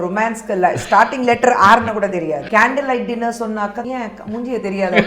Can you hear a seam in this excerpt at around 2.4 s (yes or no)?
yes